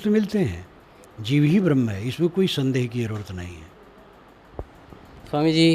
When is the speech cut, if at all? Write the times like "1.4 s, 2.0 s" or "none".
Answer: 4.4 s